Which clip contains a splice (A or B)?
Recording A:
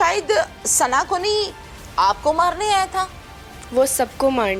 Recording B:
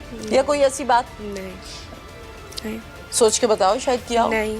B